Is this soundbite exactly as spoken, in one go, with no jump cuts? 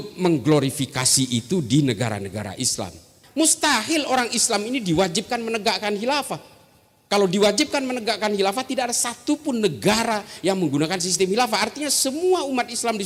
no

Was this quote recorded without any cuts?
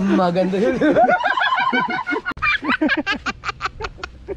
yes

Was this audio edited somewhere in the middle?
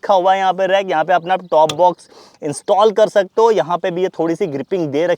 no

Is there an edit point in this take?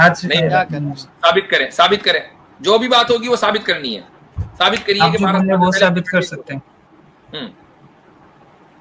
no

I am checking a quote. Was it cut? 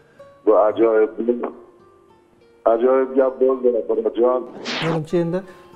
yes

